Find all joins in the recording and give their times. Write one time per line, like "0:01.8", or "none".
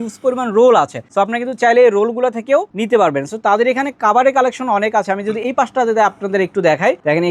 none